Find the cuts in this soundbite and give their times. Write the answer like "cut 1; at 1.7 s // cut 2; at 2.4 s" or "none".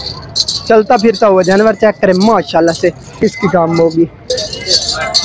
cut 1; at 3.2 s